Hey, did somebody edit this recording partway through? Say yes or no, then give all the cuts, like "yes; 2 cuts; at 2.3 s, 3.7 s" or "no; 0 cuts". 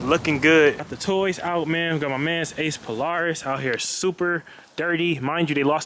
yes; 1 cut; at 0.9 s